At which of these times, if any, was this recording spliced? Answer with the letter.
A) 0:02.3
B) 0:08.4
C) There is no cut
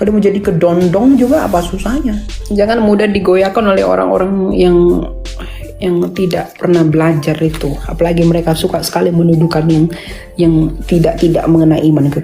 A